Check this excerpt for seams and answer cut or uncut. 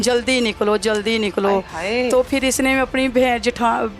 uncut